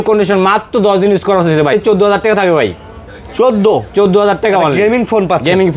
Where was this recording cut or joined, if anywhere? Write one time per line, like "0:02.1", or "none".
0:01.7